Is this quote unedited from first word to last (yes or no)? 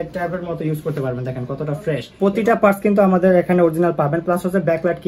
no